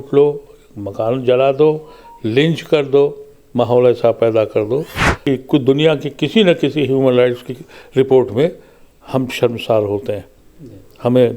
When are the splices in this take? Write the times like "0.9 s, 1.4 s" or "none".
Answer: 5.1 s